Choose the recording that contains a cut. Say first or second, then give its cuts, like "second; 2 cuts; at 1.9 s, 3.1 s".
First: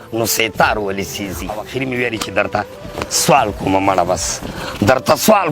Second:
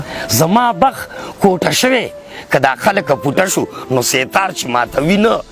first; 1 cut; at 1.6 s